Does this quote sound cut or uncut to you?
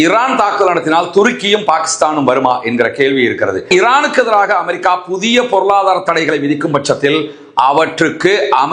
cut